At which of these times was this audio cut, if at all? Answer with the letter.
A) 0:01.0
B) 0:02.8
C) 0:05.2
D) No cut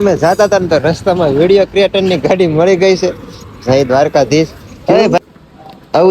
C